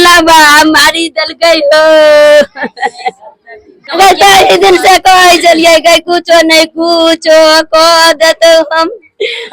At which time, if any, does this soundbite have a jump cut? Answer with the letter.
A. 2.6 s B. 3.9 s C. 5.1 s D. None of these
B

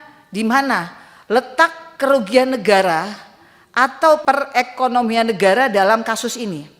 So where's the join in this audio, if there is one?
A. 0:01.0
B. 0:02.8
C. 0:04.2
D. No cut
C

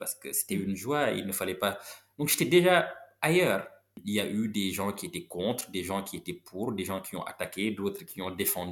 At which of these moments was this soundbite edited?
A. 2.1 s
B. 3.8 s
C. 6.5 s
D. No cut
B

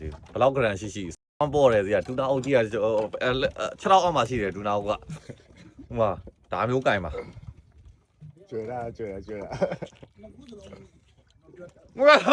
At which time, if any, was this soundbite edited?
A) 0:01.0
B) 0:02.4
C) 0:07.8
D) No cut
D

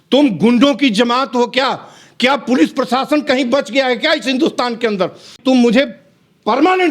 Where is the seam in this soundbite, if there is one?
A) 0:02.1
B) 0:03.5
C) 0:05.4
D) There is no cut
C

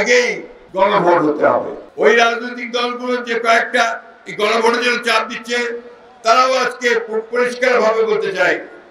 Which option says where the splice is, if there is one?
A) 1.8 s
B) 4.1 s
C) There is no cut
A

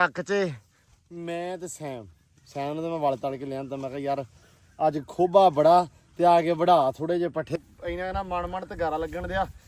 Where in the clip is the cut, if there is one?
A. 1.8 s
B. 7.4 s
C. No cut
B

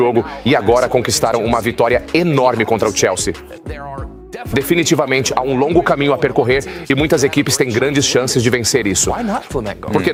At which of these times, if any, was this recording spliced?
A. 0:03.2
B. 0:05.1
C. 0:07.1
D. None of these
D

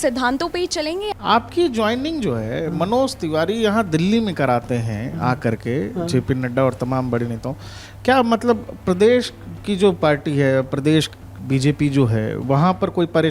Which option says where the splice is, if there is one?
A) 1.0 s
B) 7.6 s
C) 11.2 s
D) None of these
A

